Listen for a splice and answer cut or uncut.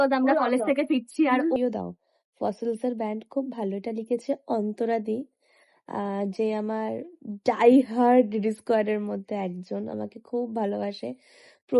cut